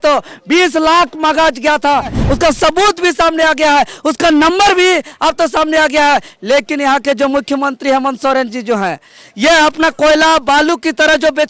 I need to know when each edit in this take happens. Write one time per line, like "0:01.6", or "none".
0:02.2